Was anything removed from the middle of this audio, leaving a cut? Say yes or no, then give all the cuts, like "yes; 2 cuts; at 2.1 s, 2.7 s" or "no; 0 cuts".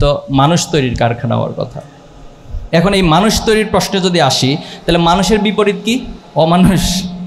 yes; 1 cut; at 6.2 s